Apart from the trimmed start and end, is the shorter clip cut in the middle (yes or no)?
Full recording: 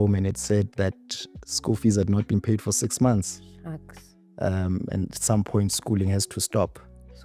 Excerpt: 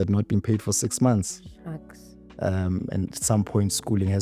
no